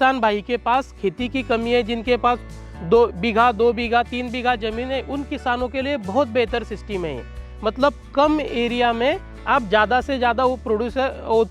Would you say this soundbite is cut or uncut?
uncut